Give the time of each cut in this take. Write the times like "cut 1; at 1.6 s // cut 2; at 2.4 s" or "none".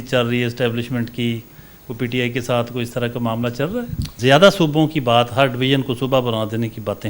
cut 1; at 4.1 s